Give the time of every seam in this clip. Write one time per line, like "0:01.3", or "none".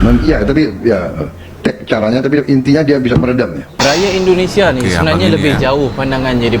0:03.8